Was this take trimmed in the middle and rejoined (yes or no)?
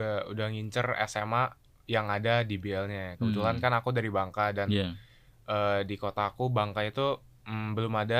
no